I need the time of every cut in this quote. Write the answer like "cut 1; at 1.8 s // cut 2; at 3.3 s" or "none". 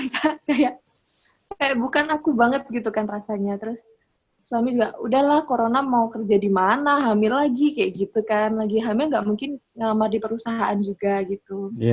none